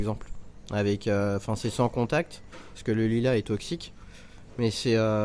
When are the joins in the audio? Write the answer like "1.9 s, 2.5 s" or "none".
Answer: none